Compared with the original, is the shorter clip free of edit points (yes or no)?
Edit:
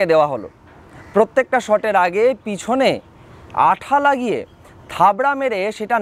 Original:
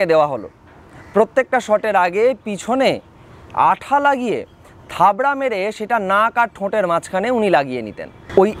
yes